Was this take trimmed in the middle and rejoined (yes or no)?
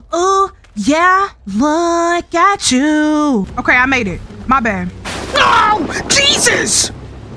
yes